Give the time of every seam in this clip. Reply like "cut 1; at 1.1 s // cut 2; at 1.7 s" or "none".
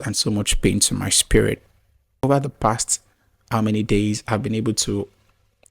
cut 1; at 2.2 s